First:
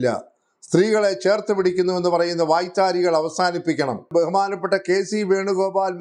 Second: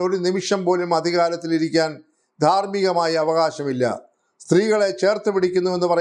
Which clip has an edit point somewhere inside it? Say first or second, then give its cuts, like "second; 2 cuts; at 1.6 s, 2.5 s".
first; 1 cut; at 4.1 s